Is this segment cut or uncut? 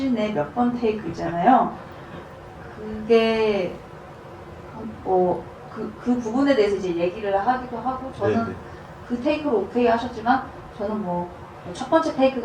uncut